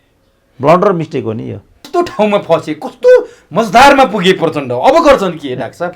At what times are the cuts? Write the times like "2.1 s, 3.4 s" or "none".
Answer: 1.9 s